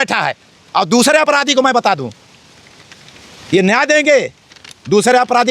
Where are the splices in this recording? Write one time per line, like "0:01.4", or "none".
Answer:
none